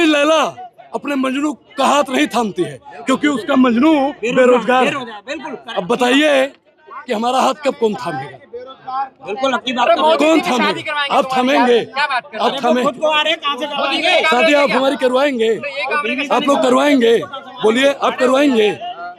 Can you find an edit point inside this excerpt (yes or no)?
no